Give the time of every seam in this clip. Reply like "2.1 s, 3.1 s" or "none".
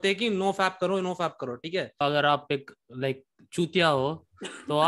2.0 s